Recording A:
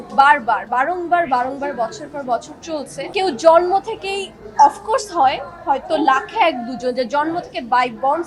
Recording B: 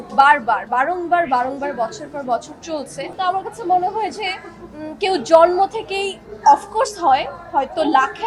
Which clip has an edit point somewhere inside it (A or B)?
A